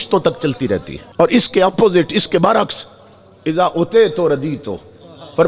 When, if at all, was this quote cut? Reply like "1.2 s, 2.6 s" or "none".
1.0 s

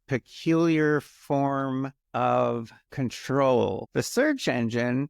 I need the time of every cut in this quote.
2.0 s, 2.8 s, 3.8 s

